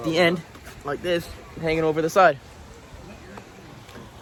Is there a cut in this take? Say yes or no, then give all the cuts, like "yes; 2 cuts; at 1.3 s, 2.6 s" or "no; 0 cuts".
no; 0 cuts